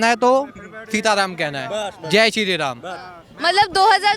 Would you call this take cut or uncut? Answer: uncut